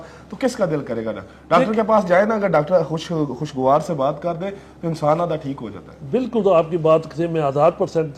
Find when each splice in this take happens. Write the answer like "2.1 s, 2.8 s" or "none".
none